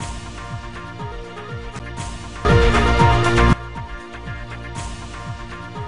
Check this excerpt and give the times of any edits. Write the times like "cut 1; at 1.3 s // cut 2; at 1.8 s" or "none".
none